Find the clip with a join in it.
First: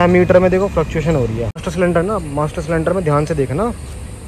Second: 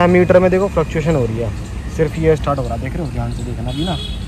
first; 1 cut; at 1.7 s

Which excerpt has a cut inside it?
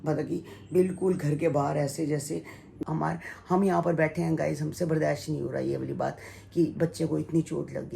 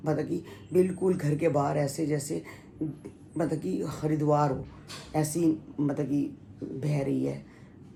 first; 1 cut; at 2.8 s

